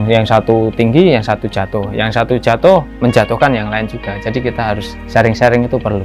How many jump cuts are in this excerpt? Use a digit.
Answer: 1